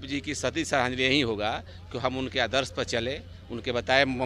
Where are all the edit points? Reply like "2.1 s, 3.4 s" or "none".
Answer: none